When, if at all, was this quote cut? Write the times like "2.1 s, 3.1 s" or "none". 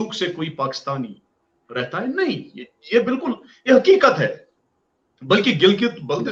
none